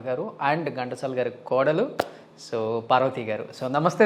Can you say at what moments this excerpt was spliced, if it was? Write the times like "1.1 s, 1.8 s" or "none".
none